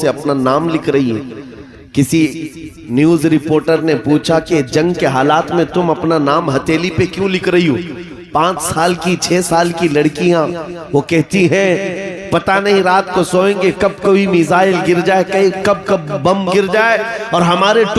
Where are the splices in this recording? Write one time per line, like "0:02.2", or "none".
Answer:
none